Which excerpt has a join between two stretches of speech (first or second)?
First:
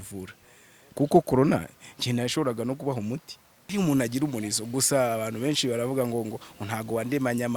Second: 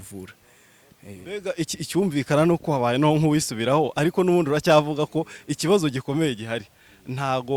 first